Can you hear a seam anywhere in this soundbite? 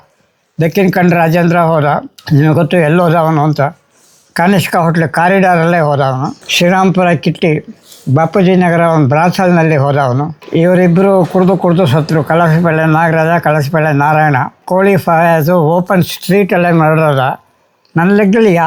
no; 0 cuts

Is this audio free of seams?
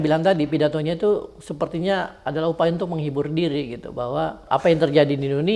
no; 1 cut; at 4.4 s

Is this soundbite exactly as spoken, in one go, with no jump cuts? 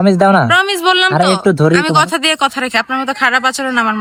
yes; 0 cuts

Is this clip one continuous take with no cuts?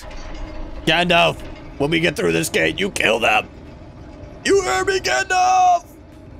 yes; 0 cuts

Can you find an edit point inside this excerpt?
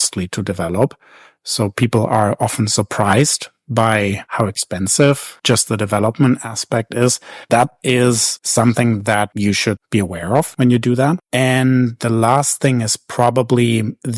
yes; 1 cut; at 10.5 s

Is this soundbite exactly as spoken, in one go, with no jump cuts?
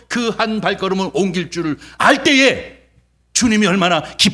yes; 0 cuts

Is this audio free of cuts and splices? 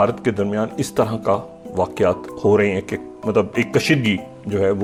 yes; 0 cuts

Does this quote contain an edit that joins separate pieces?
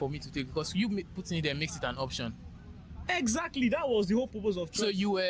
no; 0 cuts

